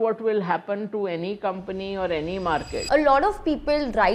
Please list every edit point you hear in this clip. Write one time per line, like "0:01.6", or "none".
0:02.7

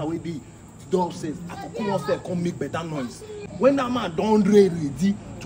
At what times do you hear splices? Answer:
0:03.4

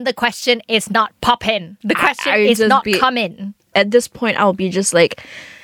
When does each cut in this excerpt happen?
0:01.7

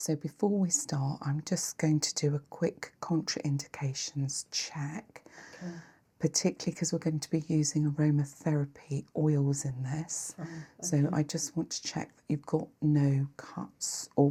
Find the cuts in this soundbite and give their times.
none

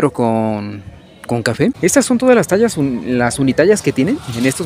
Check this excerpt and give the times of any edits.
0:01.8

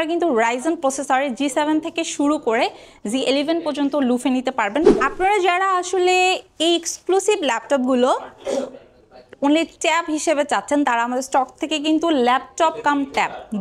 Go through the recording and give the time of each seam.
0:04.9

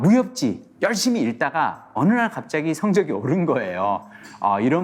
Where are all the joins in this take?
none

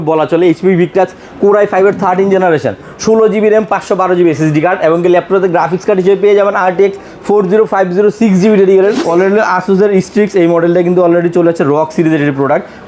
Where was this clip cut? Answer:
0:09.0

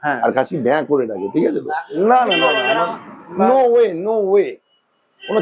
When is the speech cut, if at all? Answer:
0:01.8

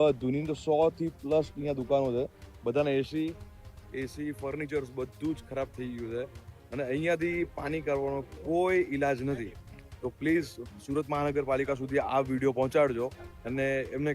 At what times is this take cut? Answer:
none

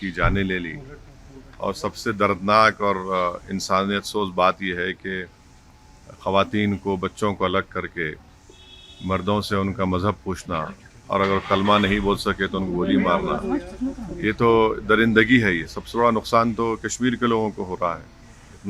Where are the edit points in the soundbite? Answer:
0:15.8

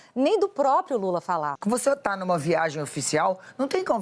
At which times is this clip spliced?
0:01.5

